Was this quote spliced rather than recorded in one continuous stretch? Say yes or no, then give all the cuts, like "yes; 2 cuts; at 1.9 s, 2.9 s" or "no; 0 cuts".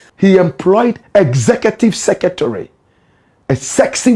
yes; 1 cut; at 1.0 s